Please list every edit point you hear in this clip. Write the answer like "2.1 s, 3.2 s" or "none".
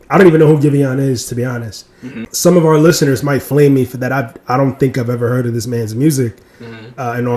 none